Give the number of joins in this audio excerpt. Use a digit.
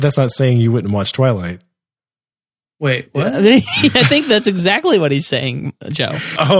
0